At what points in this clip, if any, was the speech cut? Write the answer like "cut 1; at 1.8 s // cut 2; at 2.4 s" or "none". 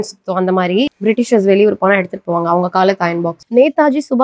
cut 1; at 0.9 s // cut 2; at 3.4 s